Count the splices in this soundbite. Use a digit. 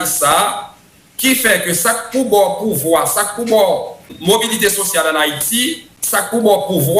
2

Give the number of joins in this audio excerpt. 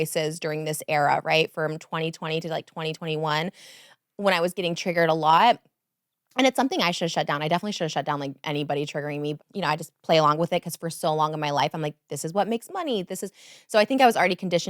1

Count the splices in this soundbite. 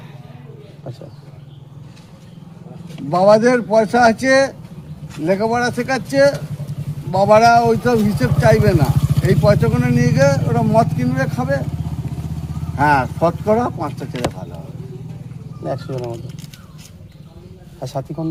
0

